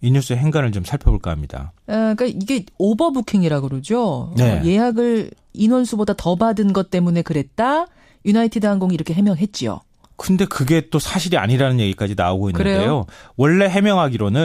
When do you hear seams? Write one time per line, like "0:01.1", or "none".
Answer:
none